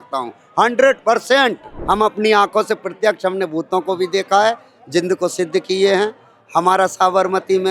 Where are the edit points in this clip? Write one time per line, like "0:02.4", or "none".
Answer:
0:01.7